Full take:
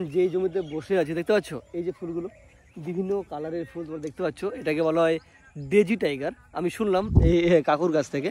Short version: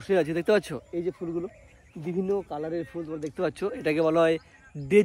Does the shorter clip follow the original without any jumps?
yes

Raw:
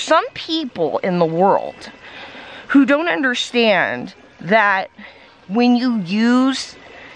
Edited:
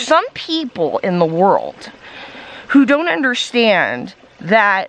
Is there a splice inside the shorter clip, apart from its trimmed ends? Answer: no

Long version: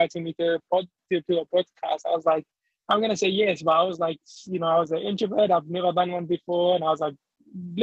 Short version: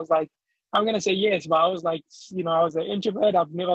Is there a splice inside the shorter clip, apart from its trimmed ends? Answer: no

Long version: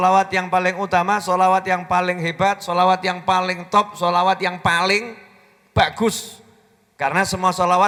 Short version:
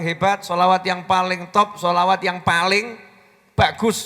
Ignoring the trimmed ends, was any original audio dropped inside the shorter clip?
no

